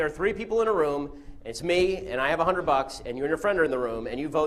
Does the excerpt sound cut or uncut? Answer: uncut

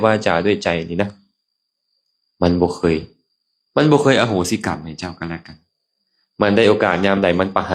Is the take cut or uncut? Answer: uncut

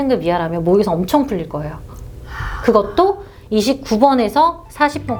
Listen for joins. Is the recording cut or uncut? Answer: uncut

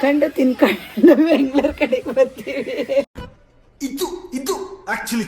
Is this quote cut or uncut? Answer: cut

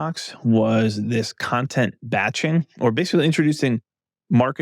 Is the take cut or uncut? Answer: uncut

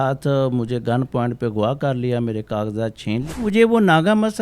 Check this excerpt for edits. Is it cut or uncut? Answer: cut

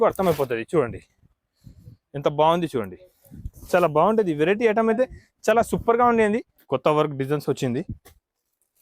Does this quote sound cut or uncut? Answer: cut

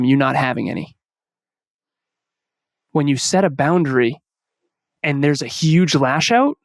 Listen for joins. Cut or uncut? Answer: uncut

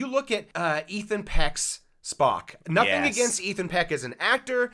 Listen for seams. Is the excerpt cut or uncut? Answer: uncut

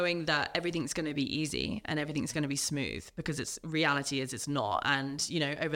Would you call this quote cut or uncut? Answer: uncut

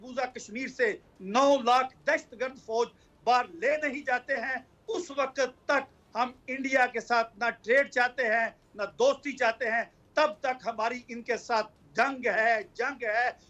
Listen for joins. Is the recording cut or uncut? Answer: uncut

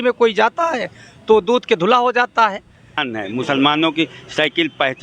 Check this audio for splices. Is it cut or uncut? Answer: cut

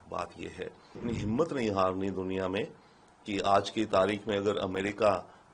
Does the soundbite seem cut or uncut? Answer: cut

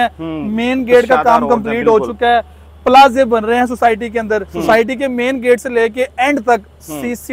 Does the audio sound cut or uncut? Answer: cut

